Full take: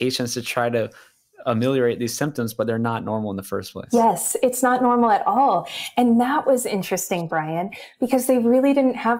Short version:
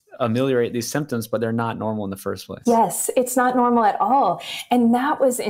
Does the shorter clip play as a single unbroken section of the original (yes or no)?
yes